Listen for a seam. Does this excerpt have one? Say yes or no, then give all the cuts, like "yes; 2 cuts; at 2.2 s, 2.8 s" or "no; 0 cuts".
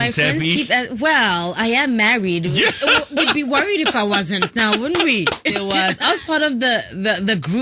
yes; 1 cut; at 5.6 s